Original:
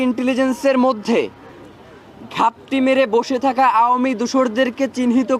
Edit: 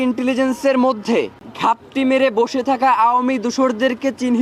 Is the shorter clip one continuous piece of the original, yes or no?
no